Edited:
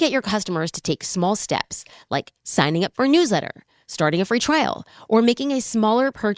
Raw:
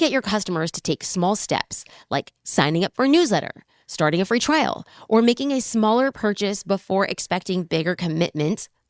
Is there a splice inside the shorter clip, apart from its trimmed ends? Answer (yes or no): no